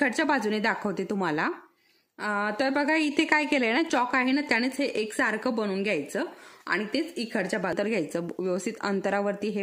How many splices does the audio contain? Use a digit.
2